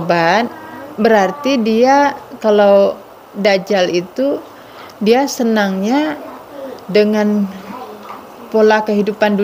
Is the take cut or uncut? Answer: uncut